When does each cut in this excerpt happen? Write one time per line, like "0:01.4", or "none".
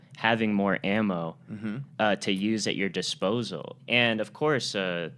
0:03.7